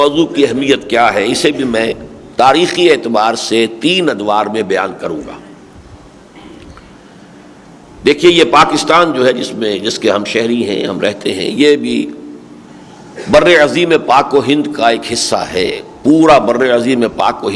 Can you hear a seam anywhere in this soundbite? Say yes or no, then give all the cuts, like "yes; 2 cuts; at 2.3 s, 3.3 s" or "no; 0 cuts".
no; 0 cuts